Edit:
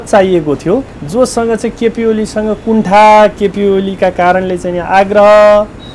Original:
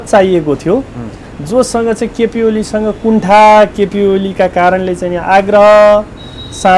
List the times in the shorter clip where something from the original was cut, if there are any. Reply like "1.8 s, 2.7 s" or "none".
1.0 s